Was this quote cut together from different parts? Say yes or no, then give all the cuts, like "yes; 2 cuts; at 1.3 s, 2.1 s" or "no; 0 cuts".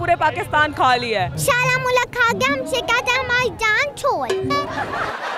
yes; 1 cut; at 1.3 s